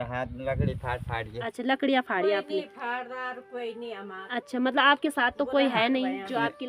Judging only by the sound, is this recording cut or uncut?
uncut